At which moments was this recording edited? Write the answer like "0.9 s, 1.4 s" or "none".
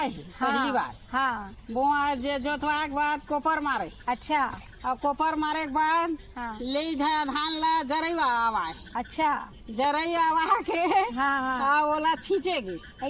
none